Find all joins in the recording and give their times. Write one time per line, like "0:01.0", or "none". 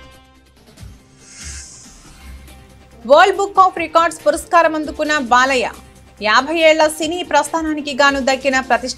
none